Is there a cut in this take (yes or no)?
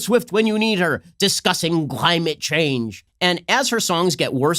yes